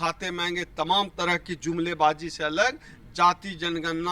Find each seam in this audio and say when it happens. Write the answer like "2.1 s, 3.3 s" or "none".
none